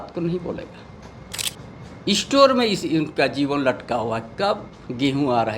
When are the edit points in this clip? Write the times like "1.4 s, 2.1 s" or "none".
1.5 s